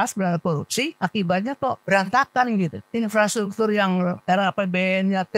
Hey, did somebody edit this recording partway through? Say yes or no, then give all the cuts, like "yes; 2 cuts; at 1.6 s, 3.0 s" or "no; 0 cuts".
yes; 4 cuts; at 0.9 s, 1.8 s, 2.8 s, 4.2 s